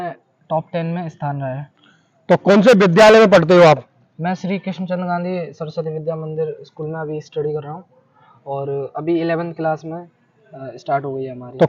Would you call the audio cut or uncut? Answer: uncut